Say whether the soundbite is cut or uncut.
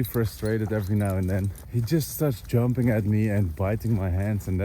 cut